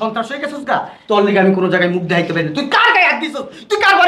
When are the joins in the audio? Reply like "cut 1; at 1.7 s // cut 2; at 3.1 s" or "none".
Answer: none